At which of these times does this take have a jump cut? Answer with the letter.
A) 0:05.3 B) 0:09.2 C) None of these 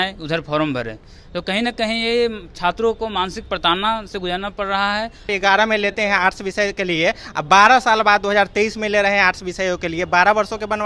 A